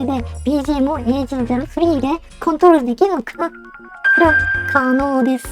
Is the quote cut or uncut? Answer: uncut